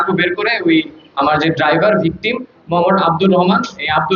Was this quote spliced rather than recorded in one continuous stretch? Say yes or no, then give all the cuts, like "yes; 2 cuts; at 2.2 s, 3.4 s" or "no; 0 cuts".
no; 0 cuts